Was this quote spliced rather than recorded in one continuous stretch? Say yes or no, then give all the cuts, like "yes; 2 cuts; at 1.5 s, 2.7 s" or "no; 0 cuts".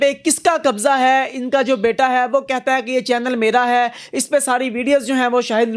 no; 0 cuts